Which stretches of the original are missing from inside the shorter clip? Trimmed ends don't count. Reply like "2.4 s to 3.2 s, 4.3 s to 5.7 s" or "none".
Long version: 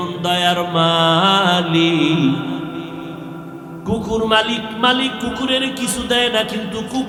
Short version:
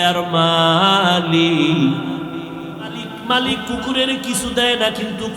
3.5 s to 4.6 s